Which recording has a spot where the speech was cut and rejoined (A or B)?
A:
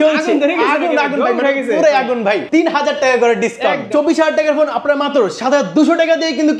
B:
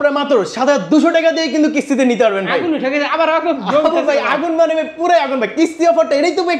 A